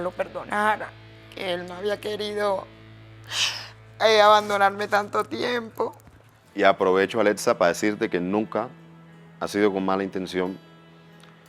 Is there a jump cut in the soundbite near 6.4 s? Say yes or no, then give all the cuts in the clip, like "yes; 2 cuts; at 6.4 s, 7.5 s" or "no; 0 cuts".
yes; 1 cut; at 6.4 s